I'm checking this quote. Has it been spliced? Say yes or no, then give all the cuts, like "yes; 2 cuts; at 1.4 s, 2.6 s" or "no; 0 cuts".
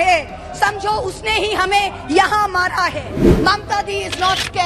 yes; 1 cut; at 3.4 s